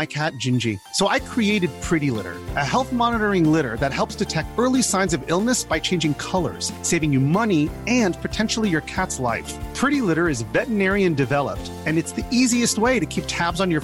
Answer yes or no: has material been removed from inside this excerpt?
no